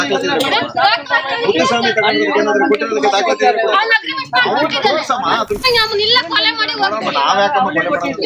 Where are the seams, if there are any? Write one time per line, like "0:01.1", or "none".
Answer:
0:05.6